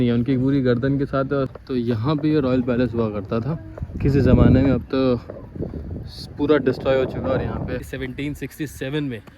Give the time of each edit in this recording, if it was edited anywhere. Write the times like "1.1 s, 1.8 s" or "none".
1.5 s, 7.9 s